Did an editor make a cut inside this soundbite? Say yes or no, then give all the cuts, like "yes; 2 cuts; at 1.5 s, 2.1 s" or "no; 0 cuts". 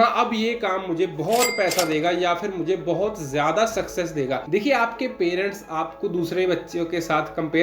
yes; 1 cut; at 4.4 s